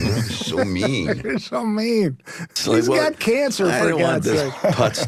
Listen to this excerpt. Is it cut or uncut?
uncut